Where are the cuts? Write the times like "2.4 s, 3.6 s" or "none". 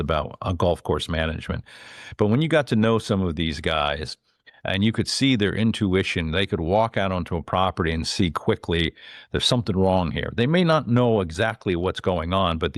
none